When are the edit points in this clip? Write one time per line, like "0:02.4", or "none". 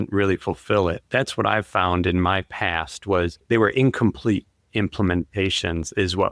0:03.4